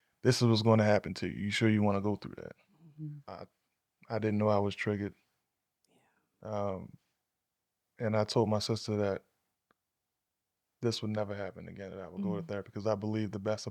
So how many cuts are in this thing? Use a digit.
1